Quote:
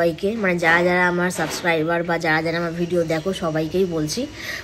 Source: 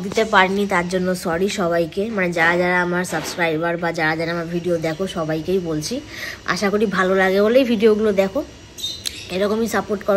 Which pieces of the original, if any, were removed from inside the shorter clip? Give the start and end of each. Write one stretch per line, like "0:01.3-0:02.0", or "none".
none